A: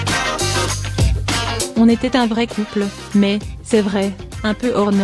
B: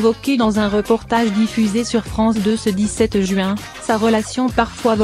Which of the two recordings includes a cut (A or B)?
A